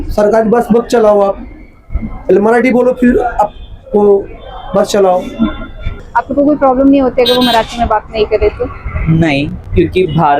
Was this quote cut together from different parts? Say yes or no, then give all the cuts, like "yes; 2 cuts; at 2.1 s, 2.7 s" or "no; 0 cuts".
yes; 1 cut; at 6.0 s